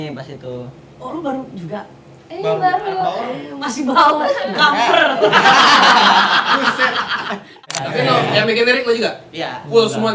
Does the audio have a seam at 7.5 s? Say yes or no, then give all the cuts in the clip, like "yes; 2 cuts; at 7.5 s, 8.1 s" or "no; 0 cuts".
yes; 1 cut; at 7.5 s